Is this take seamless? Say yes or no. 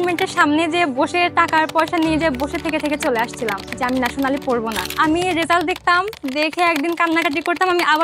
no